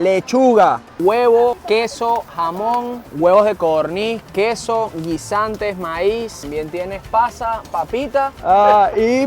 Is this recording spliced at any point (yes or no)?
yes